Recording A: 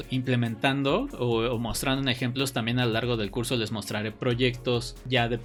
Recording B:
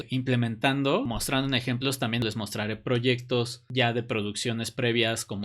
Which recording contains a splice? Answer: B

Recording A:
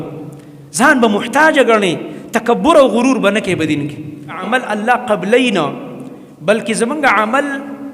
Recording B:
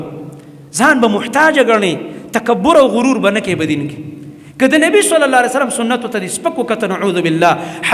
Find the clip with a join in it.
A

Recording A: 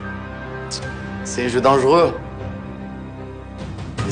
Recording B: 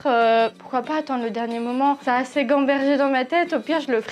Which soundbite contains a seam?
B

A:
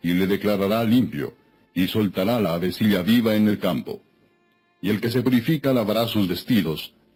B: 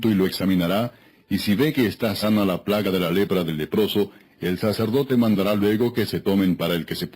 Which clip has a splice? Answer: B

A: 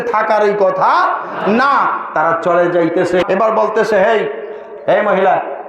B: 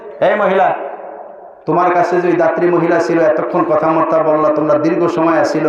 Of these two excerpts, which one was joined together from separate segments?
A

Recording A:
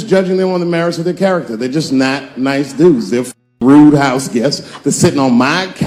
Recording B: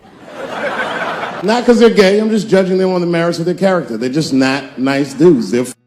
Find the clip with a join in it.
B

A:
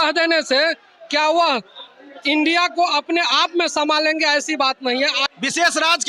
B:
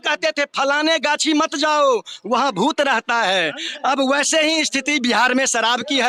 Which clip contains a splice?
A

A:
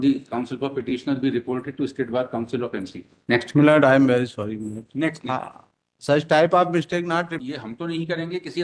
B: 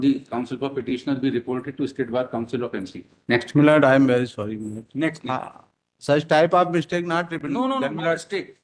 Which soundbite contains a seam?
A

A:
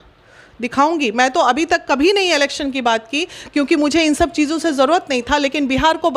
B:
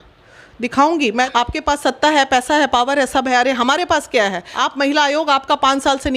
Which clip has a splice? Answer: B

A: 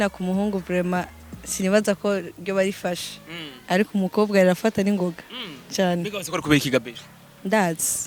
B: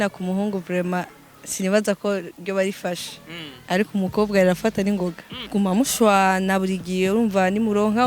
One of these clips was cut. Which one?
B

